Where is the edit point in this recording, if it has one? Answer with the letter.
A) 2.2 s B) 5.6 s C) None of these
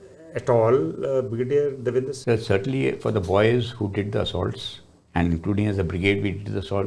A